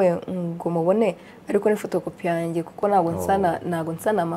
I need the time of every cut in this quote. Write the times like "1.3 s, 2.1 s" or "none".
none